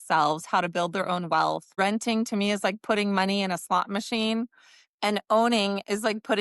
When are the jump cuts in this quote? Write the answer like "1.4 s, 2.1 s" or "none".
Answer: 1.7 s